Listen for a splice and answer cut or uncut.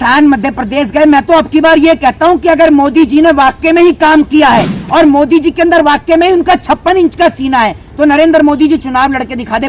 uncut